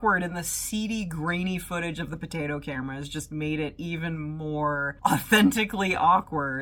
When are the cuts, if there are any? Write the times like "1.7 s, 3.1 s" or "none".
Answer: none